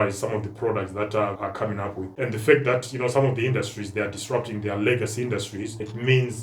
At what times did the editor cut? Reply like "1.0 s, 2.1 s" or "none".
1.4 s